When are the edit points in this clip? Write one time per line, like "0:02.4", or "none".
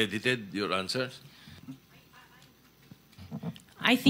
none